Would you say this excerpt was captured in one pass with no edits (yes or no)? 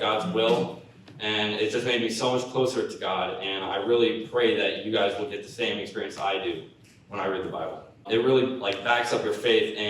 no